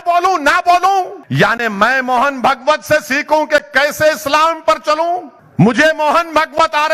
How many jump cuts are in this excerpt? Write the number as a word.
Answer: two